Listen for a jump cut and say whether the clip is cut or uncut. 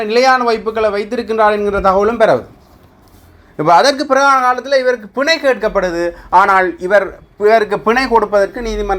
uncut